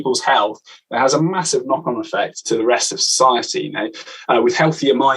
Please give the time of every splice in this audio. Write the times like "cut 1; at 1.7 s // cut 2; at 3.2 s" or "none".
cut 1; at 2.4 s